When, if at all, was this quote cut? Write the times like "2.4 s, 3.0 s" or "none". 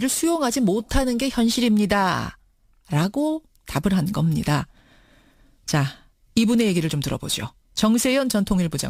none